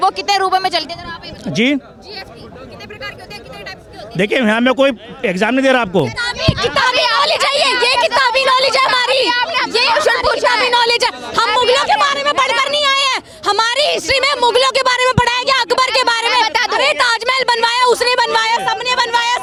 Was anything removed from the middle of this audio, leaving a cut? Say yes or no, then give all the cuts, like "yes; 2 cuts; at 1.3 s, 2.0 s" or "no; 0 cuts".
no; 0 cuts